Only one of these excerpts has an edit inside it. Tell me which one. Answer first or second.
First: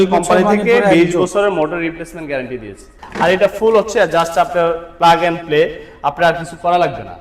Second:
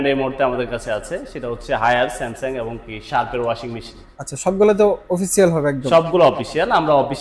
first